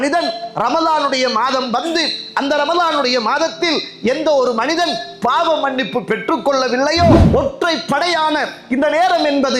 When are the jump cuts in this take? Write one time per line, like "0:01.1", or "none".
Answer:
0:07.3